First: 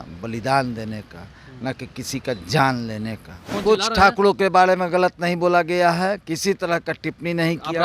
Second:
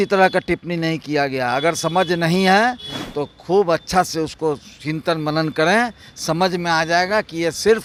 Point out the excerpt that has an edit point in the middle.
first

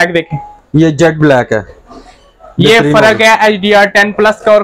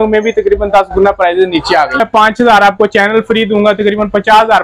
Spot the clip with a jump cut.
second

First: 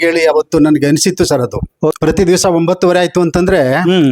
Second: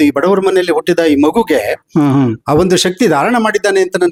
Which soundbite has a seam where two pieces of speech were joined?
first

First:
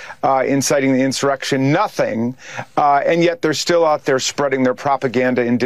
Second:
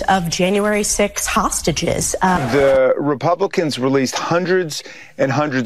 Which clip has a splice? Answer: second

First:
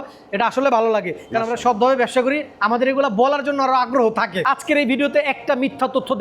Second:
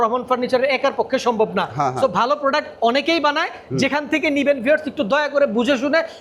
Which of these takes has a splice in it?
first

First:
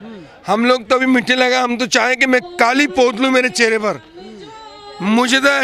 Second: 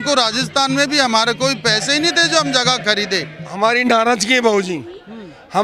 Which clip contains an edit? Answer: second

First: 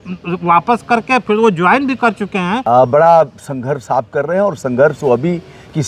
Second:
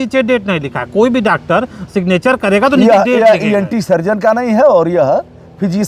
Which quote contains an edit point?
first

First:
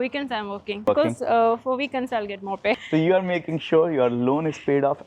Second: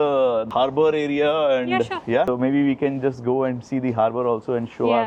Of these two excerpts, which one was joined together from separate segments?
first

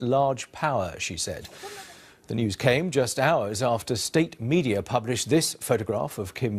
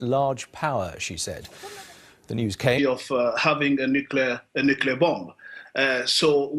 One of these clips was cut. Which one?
first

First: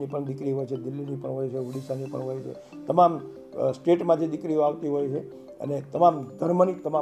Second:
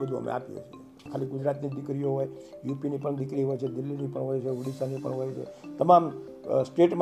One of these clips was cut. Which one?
second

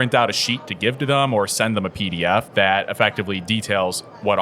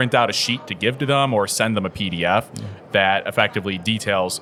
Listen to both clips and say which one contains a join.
first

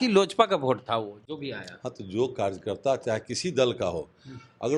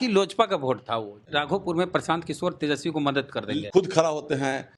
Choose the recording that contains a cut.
second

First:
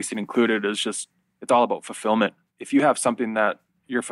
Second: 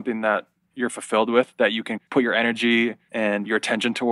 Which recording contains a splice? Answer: second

